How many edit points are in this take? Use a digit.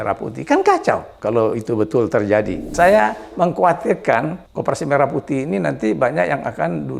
3